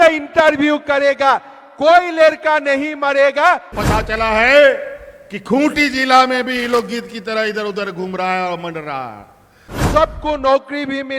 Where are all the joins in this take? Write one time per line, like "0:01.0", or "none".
0:03.8
0:09.7